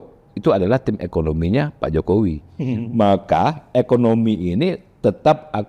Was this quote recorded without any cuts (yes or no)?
yes